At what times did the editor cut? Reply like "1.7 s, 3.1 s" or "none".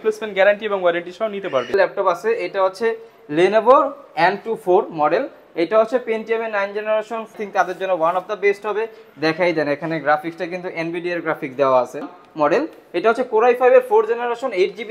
1.7 s, 7.3 s, 12.2 s